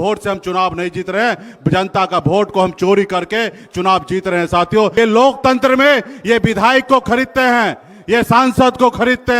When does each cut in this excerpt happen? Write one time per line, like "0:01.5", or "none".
0:04.9